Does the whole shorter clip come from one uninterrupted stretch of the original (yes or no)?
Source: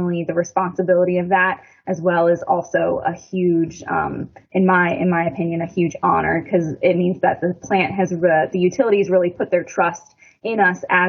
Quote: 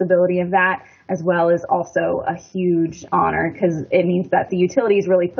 no